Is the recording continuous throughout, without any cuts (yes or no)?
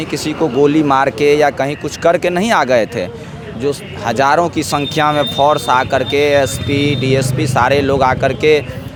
yes